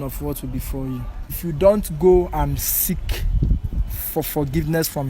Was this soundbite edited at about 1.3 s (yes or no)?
yes